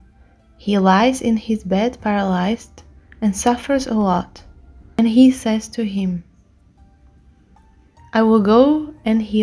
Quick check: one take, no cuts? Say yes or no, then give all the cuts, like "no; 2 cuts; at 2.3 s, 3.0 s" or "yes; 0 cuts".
no; 1 cut; at 5.0 s